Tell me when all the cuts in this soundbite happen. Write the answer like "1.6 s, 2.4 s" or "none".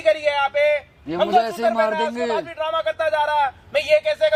none